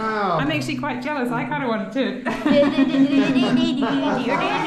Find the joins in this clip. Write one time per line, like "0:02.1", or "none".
none